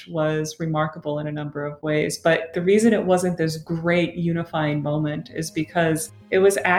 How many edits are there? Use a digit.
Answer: 1